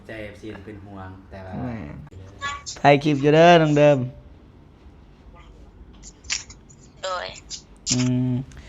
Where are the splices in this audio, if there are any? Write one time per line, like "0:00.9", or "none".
0:02.1